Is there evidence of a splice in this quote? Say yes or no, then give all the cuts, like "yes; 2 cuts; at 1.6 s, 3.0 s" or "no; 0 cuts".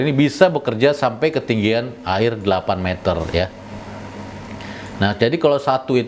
no; 0 cuts